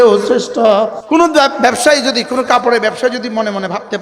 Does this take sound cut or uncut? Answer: cut